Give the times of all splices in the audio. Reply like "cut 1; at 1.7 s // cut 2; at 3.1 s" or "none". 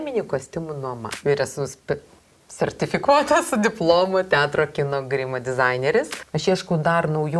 cut 1; at 1.2 s // cut 2; at 6.2 s